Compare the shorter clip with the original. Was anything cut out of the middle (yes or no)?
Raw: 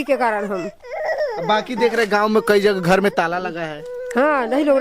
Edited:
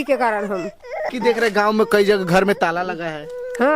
yes